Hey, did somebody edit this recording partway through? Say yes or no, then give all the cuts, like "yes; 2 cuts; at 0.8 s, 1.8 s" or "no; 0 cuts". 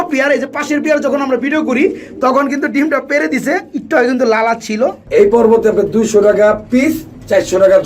yes; 1 cut; at 5.0 s